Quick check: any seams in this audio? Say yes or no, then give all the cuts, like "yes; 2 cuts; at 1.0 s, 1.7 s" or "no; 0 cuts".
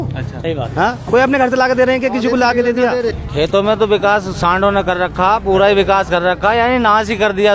yes; 1 cut; at 3.2 s